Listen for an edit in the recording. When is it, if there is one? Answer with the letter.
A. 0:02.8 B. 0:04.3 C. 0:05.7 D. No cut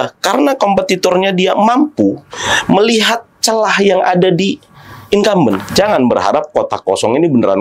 C